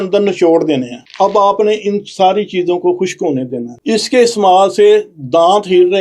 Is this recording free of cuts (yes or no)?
no